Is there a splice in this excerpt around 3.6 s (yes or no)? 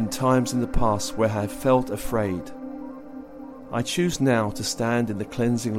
no